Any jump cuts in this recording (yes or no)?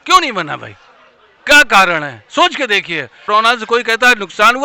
yes